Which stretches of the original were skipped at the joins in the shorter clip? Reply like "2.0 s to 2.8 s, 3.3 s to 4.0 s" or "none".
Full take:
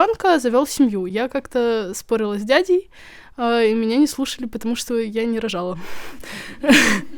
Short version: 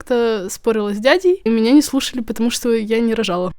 2.9 s to 3.7 s